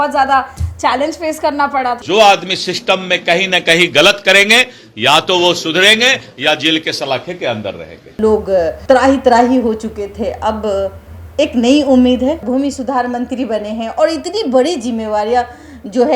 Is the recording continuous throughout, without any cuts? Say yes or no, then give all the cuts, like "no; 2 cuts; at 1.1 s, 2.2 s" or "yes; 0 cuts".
no; 3 cuts; at 2.0 s, 8.2 s, 12.4 s